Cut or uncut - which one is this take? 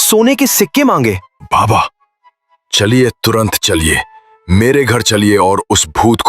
cut